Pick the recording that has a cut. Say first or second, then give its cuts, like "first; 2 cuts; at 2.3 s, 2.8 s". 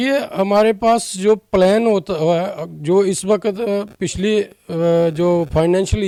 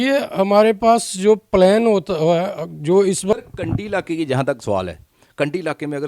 second; 1 cut; at 3.4 s